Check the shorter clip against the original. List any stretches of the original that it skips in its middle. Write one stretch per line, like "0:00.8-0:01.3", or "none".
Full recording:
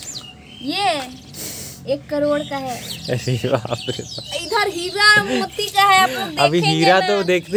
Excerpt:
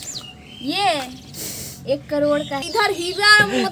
0:02.6-0:04.4